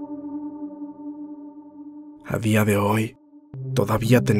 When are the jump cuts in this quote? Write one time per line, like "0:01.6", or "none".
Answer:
0:02.1